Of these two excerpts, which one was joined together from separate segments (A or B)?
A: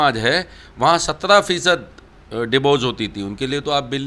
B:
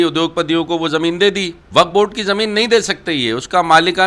B